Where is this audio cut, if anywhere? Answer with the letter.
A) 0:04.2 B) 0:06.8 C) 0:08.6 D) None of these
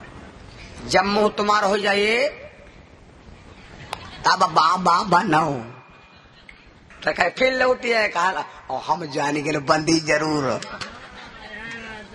B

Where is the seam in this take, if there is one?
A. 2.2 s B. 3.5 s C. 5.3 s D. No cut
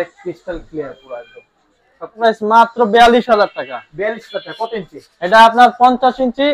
A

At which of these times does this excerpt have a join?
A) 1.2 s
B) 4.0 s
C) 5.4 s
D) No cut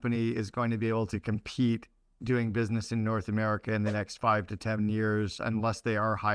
C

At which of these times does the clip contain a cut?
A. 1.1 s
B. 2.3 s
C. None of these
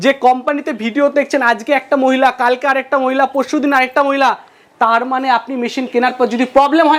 C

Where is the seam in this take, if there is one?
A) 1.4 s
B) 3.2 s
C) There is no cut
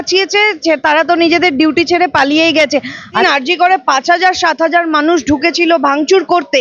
B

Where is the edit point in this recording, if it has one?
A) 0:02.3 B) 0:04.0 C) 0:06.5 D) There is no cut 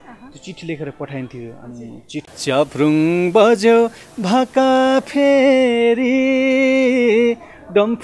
A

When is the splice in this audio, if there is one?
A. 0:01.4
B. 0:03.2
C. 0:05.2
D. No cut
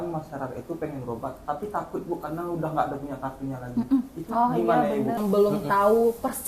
C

